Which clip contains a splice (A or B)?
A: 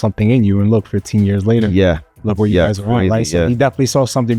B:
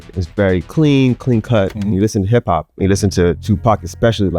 B